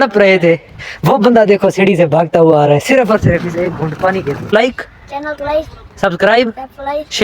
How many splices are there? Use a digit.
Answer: 1